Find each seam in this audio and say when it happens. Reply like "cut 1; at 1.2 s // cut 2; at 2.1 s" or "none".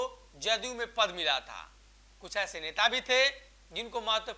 none